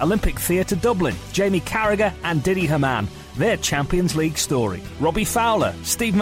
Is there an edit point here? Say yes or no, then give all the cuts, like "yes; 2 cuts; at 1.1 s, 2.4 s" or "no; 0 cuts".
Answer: no; 0 cuts